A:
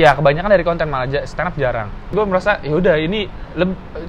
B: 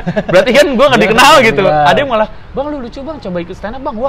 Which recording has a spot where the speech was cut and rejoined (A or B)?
A